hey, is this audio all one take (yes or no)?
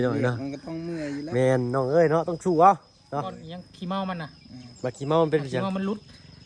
no